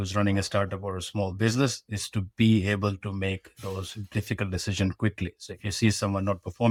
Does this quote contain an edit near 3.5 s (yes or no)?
no